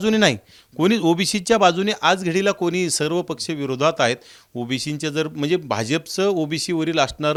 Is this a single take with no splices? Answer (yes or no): yes